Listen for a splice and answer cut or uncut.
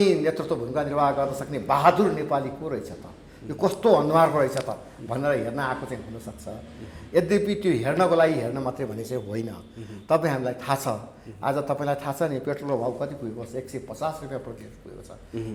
uncut